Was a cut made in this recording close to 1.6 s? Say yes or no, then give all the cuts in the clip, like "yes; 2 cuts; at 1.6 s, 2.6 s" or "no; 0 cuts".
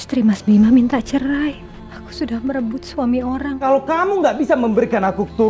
yes; 2 cuts; at 1.6 s, 3.6 s